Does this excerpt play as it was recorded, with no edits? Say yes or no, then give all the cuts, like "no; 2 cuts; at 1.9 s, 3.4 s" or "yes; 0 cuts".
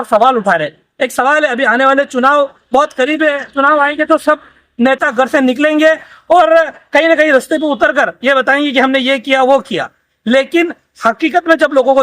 yes; 0 cuts